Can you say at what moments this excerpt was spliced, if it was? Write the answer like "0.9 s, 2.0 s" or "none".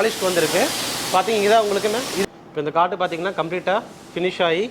2.2 s